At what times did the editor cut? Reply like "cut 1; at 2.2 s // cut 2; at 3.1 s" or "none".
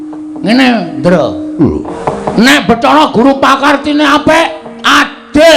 cut 1; at 1.9 s